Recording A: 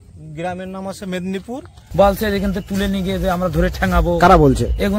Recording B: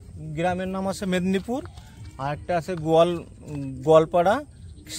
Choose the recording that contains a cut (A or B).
A